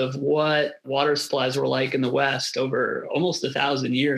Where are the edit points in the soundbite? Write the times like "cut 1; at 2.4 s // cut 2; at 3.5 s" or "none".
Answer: none